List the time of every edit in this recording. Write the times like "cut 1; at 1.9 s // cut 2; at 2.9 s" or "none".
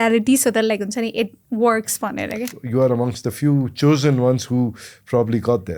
cut 1; at 2.5 s